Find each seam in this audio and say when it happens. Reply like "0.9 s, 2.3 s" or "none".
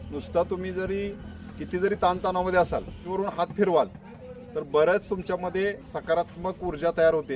3.0 s